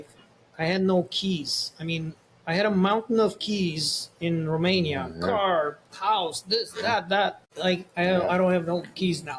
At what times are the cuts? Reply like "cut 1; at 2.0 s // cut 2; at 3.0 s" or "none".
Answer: cut 1; at 7.5 s